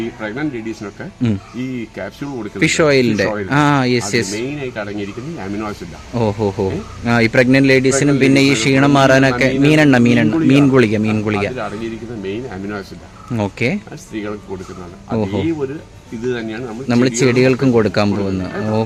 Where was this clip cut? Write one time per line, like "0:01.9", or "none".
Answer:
none

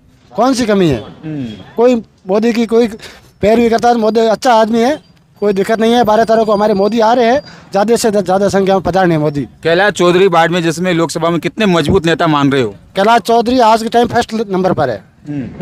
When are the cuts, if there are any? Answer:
none

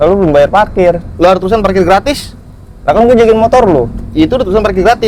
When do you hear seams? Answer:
none

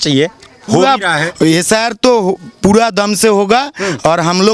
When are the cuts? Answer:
none

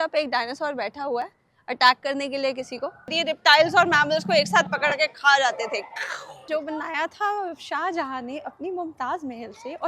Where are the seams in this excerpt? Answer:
0:03.2
0:06.4

